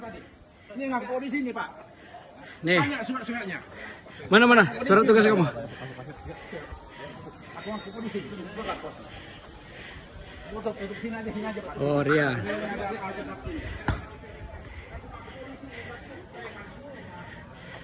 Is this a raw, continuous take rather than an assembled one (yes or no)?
yes